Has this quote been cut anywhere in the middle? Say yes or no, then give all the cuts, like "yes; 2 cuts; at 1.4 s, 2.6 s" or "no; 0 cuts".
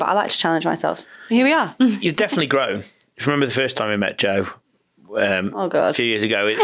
no; 0 cuts